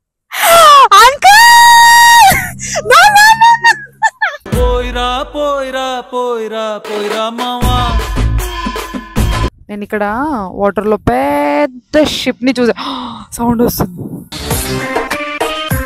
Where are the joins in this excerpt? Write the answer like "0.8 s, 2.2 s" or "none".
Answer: 9.5 s